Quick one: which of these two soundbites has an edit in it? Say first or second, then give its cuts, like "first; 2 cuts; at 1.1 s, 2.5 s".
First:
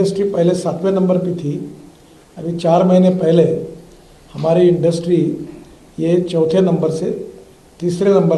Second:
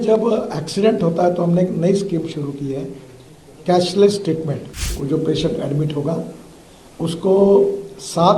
second; 1 cut; at 4.9 s